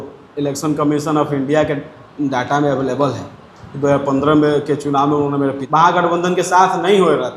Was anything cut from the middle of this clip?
yes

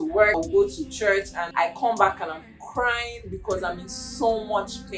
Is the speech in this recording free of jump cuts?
yes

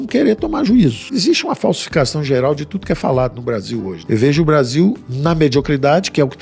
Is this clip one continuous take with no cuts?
no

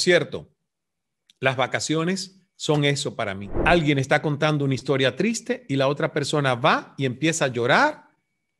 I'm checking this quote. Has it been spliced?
yes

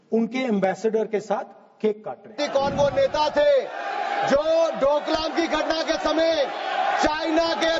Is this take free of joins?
no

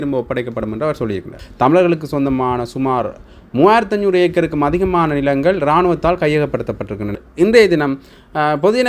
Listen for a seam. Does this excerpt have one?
yes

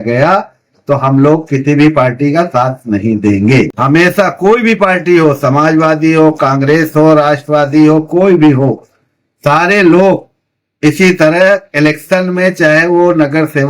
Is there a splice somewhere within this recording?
yes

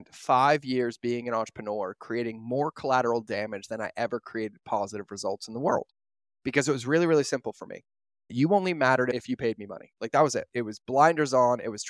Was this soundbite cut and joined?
yes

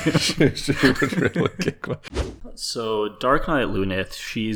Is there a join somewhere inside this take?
yes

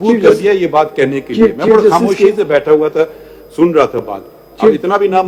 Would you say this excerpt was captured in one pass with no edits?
yes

